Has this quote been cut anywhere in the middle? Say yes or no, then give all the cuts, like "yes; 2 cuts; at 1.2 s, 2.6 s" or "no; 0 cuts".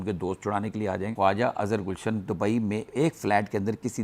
yes; 2 cuts; at 1.1 s, 2.3 s